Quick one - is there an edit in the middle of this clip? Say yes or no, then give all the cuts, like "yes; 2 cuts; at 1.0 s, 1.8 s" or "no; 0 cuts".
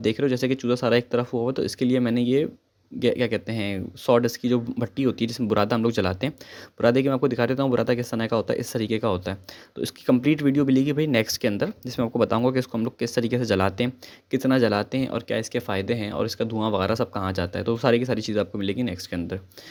no; 0 cuts